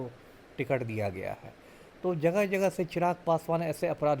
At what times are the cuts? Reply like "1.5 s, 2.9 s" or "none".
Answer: none